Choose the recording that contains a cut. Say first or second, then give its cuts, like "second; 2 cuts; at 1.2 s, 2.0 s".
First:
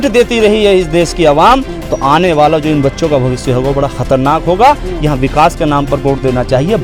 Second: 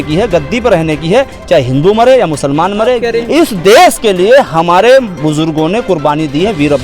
second; 1 cut; at 3.2 s